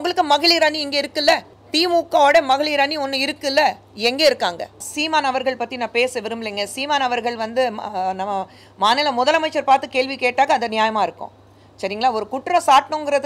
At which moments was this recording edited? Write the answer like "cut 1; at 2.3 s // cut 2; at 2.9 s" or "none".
cut 1; at 1.6 s // cut 2; at 4.9 s